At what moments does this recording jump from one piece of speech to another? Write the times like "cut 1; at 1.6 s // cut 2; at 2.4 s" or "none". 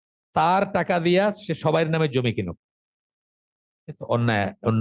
none